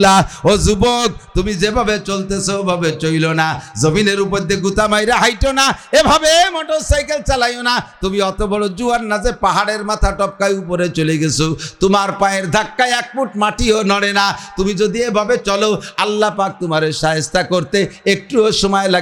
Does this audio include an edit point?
no; 0 cuts

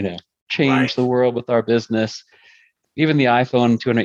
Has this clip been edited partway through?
yes; 1 cut; at 2.6 s

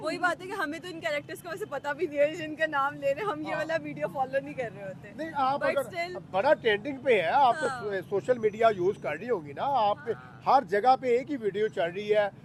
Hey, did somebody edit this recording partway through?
no; 0 cuts

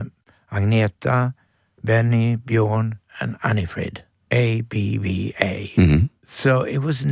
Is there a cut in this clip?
yes; 2 cuts; at 4.1 s, 6.2 s

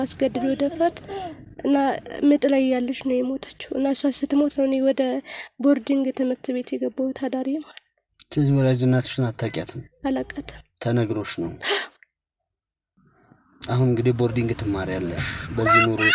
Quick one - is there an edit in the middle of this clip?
no; 0 cuts

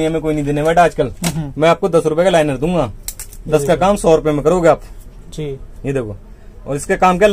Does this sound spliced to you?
no; 0 cuts

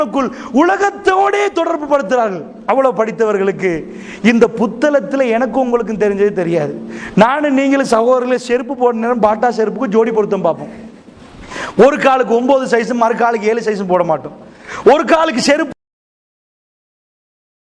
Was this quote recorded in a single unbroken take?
yes; 0 cuts

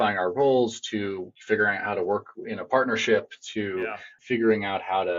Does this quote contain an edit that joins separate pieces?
yes; 2 cuts; at 1.3 s, 4.1 s

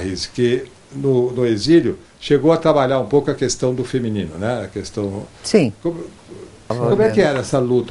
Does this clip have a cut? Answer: no; 0 cuts

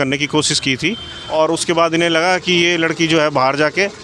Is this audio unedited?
no; 1 cut; at 1.1 s

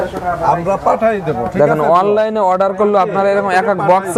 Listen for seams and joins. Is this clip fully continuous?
yes; 0 cuts

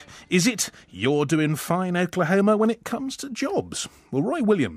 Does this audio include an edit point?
no; 0 cuts

